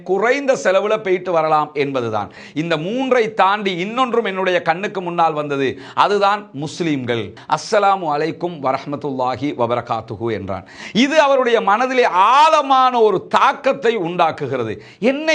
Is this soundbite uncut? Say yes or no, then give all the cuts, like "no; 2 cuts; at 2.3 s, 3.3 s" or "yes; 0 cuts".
no; 2 cuts; at 2.3 s, 7.4 s